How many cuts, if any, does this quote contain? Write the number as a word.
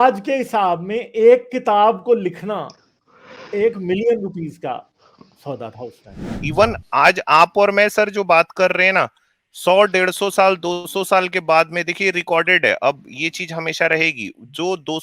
one